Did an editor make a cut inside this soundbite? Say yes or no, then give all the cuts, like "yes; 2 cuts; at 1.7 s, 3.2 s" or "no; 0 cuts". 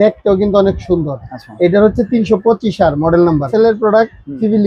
yes; 1 cut; at 3.5 s